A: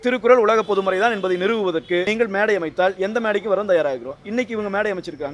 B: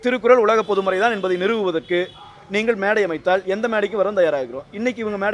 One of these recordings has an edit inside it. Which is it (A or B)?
A